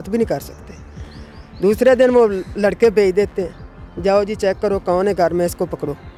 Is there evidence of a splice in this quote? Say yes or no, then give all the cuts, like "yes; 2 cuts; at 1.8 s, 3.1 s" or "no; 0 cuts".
no; 0 cuts